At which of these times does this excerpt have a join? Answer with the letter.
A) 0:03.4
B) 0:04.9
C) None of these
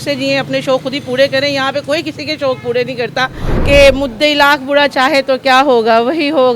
A